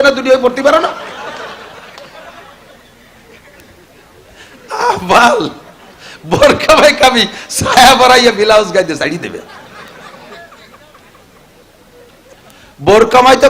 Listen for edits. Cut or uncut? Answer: cut